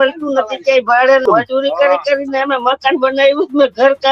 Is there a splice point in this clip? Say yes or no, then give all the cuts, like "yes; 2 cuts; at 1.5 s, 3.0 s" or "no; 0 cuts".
yes; 1 cut; at 1.2 s